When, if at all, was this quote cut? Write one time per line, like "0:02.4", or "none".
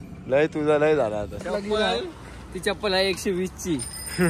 0:01.4